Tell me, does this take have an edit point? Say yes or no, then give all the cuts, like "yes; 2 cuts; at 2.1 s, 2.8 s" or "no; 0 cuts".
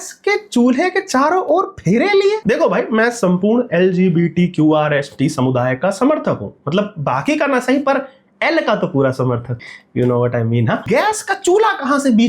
yes; 2 cuts; at 9.6 s, 10.8 s